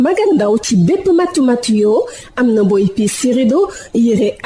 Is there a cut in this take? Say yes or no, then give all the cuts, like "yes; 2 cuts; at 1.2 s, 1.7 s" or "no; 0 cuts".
no; 0 cuts